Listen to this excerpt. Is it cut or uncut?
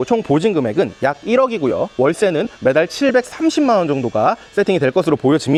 uncut